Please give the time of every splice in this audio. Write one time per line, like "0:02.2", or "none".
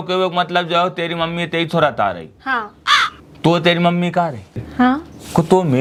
none